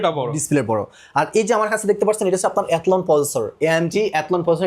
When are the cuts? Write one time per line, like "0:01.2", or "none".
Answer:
none